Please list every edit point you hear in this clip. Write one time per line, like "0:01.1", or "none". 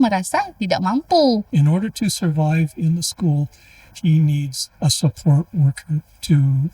0:01.5